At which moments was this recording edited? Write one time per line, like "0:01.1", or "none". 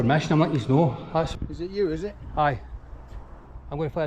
0:01.3